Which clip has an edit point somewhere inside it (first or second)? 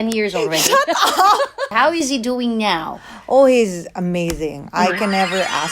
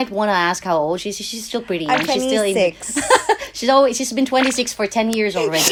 first